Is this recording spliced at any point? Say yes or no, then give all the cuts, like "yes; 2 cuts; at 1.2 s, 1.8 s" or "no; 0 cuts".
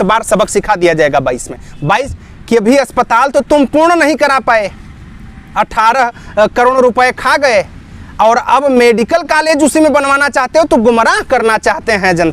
yes; 1 cut; at 2.1 s